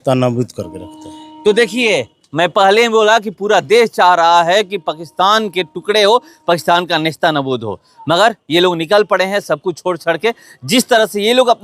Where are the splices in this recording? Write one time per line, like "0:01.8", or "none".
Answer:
none